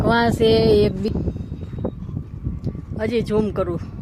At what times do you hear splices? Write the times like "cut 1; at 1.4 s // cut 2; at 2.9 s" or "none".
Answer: cut 1; at 1.1 s